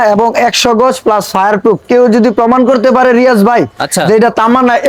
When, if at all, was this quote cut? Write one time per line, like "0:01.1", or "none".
none